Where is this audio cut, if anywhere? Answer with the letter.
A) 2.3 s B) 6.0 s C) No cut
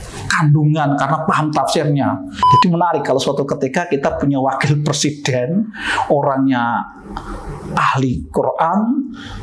A